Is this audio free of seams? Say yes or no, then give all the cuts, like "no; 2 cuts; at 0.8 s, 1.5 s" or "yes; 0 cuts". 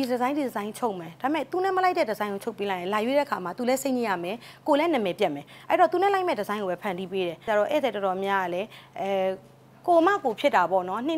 no; 1 cut; at 7.5 s